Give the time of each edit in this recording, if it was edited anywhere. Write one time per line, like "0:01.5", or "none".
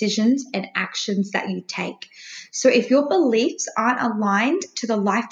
none